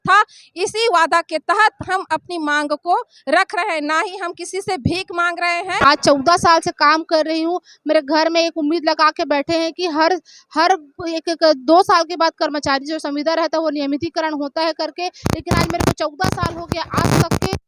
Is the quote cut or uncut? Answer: cut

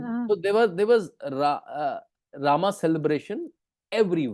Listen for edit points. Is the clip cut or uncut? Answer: uncut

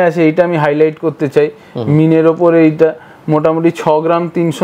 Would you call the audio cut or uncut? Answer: uncut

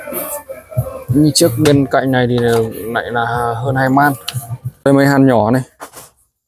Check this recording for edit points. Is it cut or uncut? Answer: cut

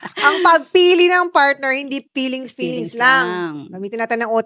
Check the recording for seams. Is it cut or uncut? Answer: uncut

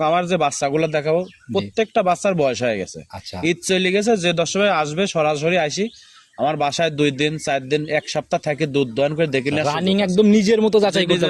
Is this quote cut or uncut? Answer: uncut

